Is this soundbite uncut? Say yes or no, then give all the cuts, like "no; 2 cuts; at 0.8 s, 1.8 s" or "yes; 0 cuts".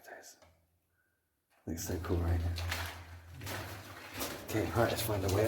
yes; 0 cuts